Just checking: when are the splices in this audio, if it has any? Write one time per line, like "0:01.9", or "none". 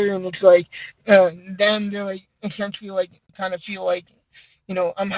0:03.3